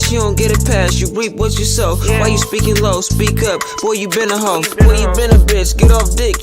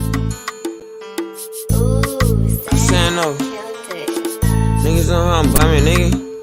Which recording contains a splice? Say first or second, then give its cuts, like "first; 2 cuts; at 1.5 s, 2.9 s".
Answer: second; 1 cut; at 1.0 s